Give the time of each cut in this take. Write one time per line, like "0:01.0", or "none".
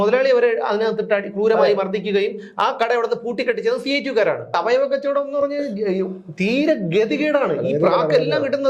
0:04.5